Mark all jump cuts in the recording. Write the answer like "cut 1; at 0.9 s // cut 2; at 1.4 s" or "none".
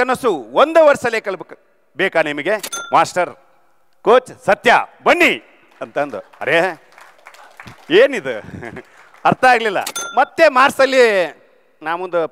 cut 1; at 2.7 s // cut 2; at 9.9 s